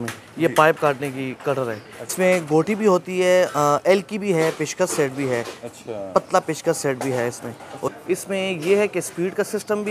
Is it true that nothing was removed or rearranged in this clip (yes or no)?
no